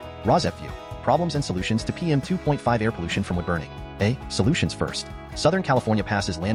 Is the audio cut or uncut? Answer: uncut